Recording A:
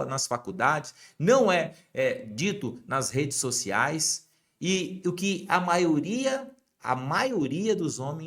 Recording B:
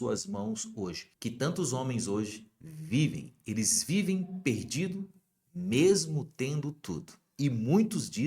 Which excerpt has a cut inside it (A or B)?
B